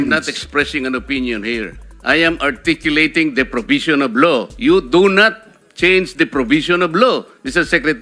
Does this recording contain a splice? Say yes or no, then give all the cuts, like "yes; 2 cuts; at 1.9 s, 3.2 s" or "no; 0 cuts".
no; 0 cuts